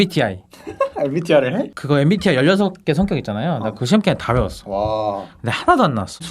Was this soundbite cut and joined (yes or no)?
no